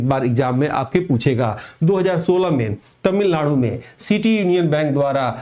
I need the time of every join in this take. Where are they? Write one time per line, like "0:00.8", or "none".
none